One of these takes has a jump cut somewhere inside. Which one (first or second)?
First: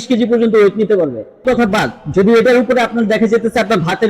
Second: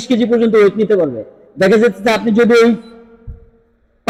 first